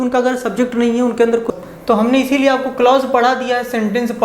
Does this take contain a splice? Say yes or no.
yes